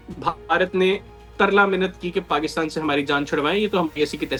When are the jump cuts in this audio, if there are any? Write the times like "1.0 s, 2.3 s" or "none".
none